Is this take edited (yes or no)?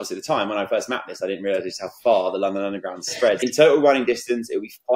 yes